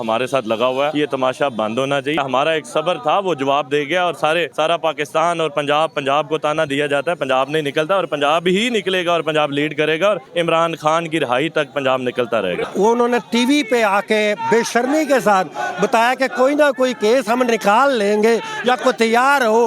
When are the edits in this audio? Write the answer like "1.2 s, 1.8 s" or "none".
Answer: 0.9 s, 2.2 s, 4.5 s, 10.3 s, 12.7 s